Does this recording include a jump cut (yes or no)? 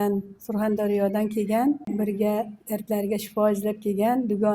yes